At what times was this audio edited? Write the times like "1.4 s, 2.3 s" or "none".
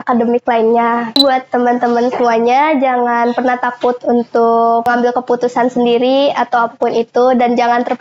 1.2 s, 4.9 s